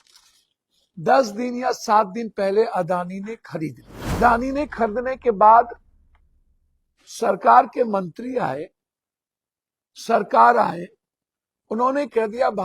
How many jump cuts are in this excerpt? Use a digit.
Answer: 1